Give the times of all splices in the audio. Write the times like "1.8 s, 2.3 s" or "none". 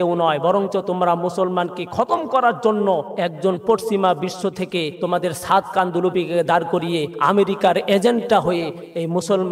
3.1 s, 4.9 s, 7.1 s